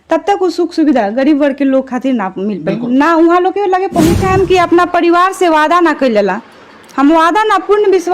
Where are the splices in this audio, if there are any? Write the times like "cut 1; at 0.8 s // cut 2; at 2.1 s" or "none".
cut 1; at 4.2 s